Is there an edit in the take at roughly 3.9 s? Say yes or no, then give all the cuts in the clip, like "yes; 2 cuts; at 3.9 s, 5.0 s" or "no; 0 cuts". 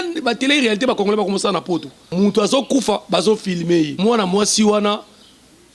yes; 2 cuts; at 2.0 s, 3.9 s